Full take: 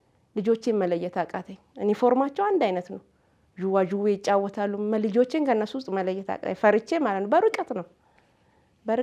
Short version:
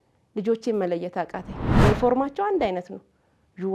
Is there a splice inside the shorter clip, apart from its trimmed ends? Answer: no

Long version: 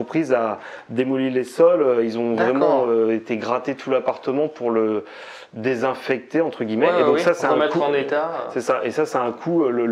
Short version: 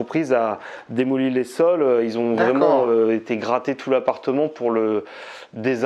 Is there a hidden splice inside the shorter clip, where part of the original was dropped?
no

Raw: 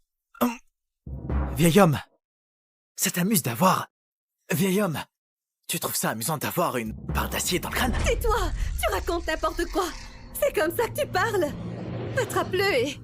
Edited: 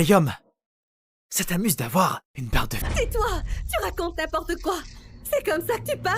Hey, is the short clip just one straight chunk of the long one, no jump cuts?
no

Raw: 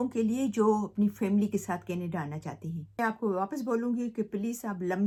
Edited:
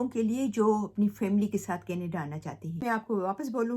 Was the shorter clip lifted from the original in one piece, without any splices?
no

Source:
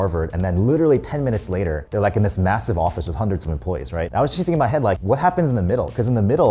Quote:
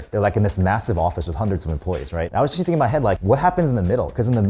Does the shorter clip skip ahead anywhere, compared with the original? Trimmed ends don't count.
no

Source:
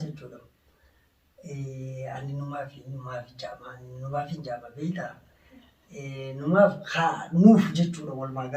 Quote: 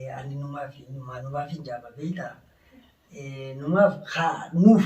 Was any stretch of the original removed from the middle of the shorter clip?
yes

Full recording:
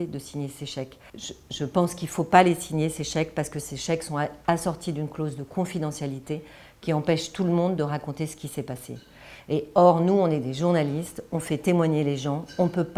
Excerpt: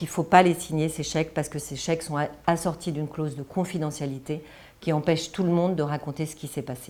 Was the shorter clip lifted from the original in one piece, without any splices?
yes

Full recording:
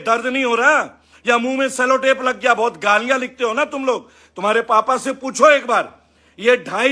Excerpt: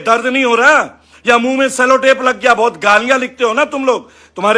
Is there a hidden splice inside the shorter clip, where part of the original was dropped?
no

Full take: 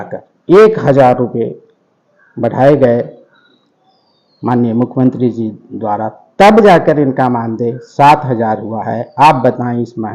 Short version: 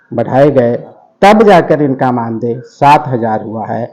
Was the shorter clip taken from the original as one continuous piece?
no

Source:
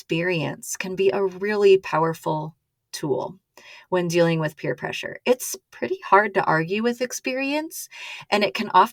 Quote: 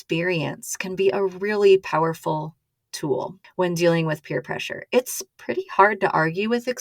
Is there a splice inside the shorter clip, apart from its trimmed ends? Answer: yes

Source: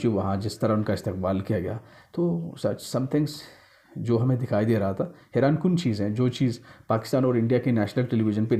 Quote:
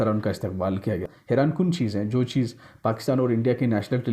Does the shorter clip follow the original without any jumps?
no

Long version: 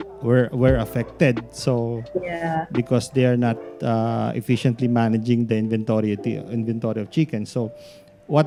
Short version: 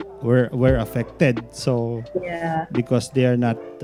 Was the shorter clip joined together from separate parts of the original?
no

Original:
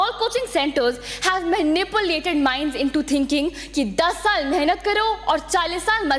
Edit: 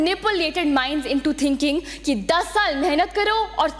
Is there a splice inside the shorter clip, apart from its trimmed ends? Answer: no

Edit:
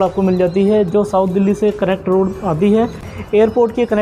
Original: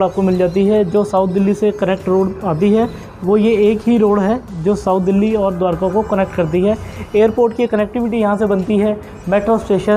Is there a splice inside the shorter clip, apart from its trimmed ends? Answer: yes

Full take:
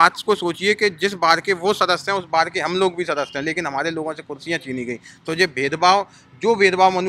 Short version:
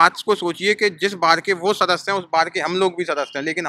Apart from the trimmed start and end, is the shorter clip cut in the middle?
no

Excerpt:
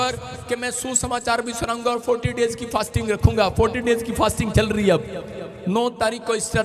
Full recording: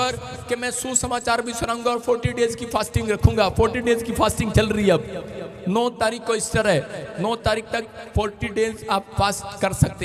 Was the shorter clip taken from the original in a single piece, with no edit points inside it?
yes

